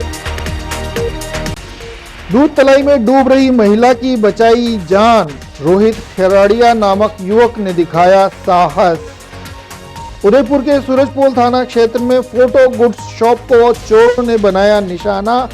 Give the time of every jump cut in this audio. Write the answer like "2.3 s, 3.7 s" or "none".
1.5 s